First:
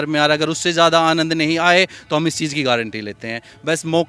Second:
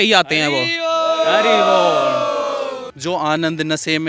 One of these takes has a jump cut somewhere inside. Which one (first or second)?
second